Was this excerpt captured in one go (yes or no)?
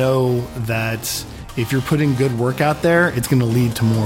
yes